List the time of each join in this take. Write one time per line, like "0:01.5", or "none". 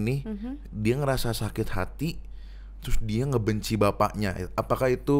none